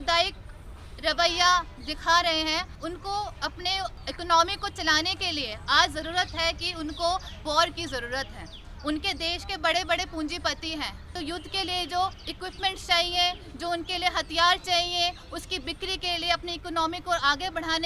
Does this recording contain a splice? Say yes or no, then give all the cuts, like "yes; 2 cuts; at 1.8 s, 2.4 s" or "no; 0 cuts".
yes; 5 cuts; at 2.8 s, 4.0 s, 7.4 s, 11.1 s, 12.2 s